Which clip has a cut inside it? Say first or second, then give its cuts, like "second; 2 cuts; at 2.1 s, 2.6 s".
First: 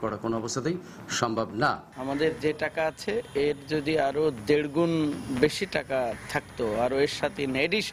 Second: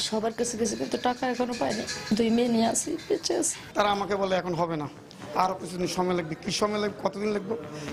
second; 1 cut; at 3.6 s